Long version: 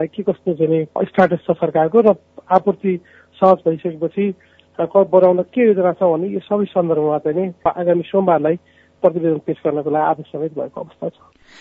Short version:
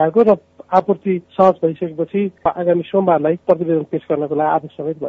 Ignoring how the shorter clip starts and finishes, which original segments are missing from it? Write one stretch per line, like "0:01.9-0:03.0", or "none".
0:03.0-0:03.3
0:04.4-0:07.5
0:08.6-0:09.0